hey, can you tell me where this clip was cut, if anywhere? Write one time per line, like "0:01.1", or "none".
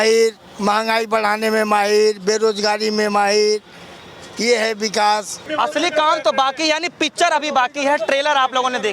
0:05.4